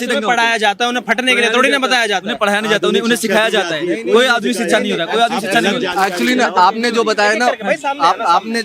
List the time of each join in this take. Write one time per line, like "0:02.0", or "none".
none